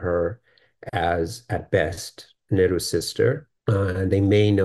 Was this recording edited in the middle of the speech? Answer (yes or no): yes